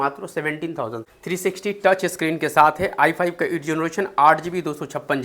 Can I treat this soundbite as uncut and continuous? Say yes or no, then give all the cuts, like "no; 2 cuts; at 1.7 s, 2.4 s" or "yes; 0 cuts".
no; 1 cut; at 1.0 s